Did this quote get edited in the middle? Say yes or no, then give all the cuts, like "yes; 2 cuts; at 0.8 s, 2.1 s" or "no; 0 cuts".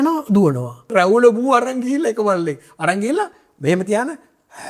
yes; 1 cut; at 0.9 s